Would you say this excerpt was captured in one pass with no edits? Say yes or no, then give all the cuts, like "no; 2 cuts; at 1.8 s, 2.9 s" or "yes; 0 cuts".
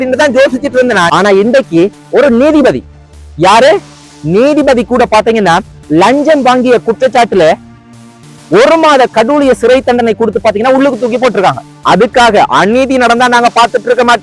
no; 2 cuts; at 1.1 s, 11.7 s